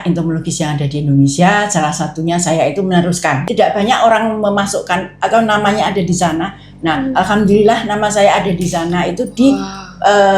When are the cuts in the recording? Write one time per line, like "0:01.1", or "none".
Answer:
0:03.5